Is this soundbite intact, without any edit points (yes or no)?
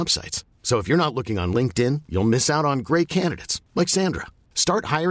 yes